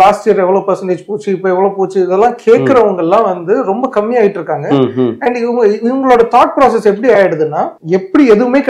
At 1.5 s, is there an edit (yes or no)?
no